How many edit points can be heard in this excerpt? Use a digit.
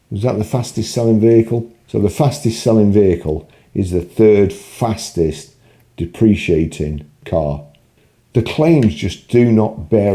2